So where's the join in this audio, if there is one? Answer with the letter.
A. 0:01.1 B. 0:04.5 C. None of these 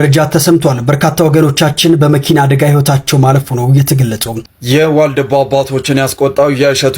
B